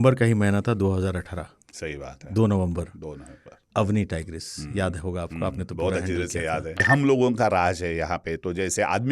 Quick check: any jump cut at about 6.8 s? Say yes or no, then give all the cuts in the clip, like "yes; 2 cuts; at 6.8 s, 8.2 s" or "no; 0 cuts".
yes; 1 cut; at 6.8 s